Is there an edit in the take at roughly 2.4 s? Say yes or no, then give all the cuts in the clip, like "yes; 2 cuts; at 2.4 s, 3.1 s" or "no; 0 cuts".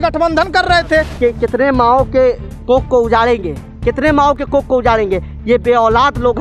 no; 1 cut; at 1.1 s